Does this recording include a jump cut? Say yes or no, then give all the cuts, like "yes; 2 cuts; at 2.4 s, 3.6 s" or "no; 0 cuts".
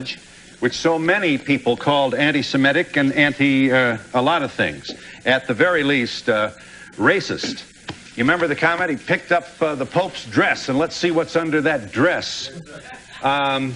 no; 0 cuts